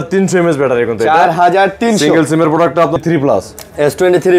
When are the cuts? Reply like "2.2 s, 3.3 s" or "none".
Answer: 3.0 s

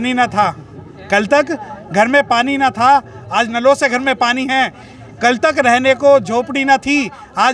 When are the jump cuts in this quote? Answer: none

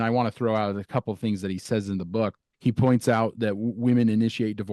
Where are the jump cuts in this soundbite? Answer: 2.5 s

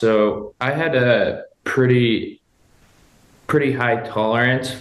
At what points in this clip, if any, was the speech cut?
none

